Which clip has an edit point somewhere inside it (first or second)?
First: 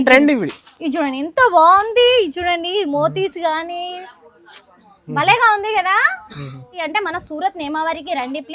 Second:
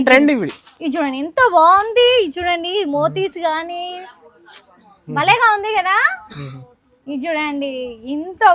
first